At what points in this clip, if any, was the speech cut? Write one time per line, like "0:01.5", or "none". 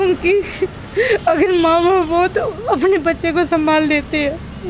none